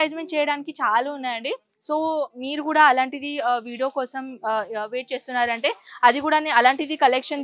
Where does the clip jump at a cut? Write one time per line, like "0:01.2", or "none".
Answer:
none